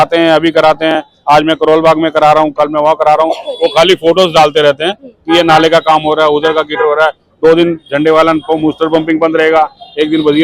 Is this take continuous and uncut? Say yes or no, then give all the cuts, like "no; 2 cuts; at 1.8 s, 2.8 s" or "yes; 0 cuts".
yes; 0 cuts